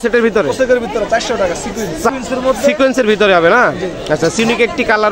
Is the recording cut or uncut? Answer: cut